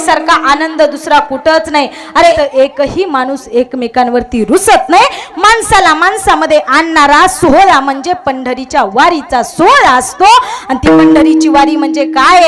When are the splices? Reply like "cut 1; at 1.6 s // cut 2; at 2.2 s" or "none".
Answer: cut 1; at 2.3 s